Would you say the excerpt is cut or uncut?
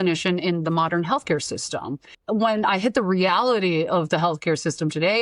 cut